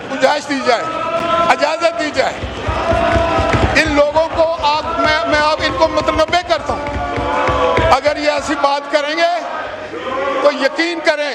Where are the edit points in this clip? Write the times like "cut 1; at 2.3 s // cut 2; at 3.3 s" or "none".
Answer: none